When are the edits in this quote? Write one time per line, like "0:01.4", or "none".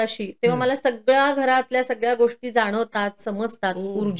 none